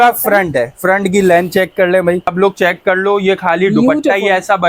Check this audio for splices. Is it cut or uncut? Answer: cut